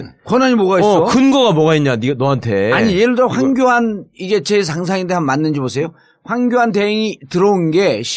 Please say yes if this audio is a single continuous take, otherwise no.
no